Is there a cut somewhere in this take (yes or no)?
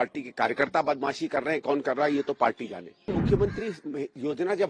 yes